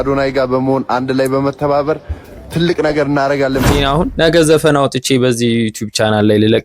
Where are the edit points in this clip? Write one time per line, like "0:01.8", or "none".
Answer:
0:03.7